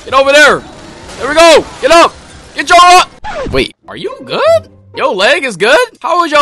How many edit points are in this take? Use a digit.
1